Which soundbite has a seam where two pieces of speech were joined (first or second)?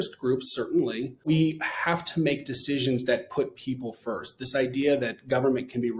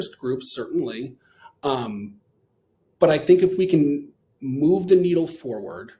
first